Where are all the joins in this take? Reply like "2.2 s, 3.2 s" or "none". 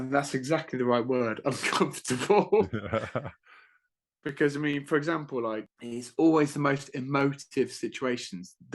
5.8 s